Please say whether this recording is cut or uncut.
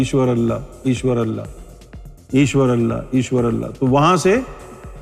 uncut